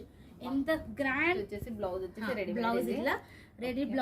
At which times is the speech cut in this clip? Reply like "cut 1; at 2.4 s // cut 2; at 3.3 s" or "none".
cut 1; at 1.4 s